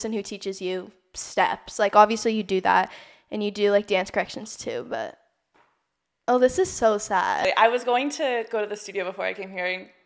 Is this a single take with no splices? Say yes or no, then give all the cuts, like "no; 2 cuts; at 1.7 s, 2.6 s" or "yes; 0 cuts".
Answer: no; 1 cut; at 7.4 s